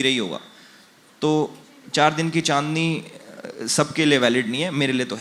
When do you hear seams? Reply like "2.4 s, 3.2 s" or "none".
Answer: none